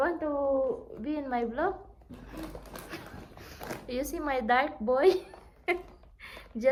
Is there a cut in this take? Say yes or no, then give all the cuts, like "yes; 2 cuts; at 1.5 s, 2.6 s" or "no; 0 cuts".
no; 0 cuts